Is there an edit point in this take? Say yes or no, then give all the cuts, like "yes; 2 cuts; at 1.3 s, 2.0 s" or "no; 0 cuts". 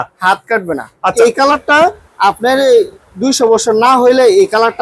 yes; 1 cut; at 1.1 s